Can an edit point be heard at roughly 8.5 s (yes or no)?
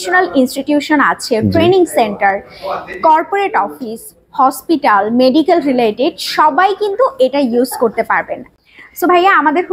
yes